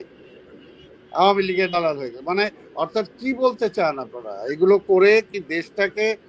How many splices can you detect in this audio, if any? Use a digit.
0